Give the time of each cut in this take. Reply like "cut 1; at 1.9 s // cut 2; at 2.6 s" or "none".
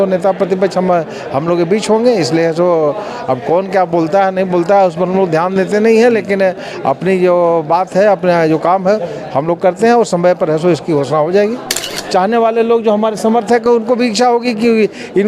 cut 1; at 11.9 s